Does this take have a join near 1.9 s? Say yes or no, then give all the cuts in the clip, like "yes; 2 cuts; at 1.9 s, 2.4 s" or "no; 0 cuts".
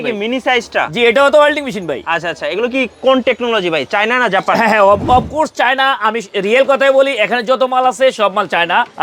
no; 0 cuts